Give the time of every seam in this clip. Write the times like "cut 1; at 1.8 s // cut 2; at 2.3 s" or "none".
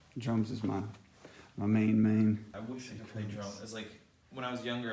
cut 1; at 2.5 s